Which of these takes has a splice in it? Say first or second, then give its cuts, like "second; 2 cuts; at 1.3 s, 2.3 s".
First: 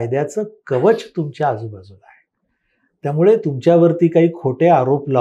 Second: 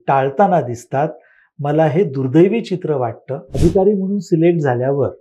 second; 1 cut; at 3.6 s